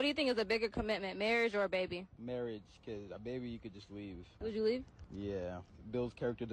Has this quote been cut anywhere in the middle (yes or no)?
no